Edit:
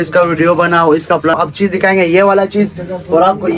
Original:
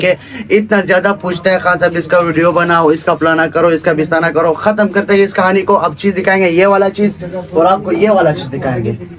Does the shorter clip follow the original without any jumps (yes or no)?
no